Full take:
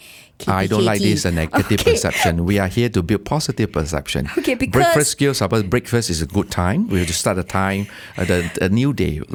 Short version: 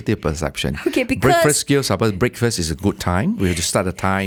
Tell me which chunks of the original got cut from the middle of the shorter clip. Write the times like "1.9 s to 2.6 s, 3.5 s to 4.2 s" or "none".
none